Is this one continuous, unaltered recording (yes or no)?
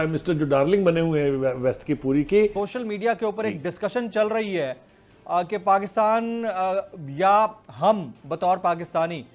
no